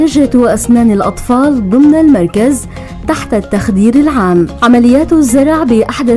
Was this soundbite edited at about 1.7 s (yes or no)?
no